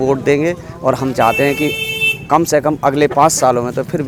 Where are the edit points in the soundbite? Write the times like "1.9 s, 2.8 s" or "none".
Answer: none